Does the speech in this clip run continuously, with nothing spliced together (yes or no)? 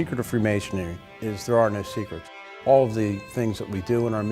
no